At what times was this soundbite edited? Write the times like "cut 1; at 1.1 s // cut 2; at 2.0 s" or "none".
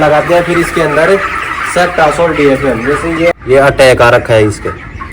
cut 1; at 3.3 s